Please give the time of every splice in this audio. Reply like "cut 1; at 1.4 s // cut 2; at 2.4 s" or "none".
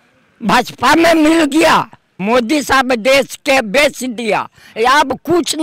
cut 1; at 2.2 s